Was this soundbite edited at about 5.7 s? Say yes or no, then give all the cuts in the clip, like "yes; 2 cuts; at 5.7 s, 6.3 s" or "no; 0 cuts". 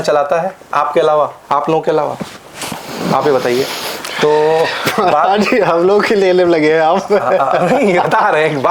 no; 0 cuts